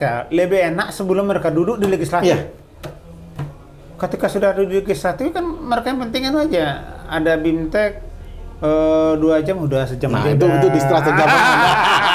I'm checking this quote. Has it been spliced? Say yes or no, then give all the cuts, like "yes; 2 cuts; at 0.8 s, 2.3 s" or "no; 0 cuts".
no; 0 cuts